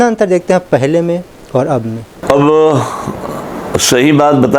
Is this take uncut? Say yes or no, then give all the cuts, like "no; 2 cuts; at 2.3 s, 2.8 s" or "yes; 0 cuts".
no; 1 cut; at 2.1 s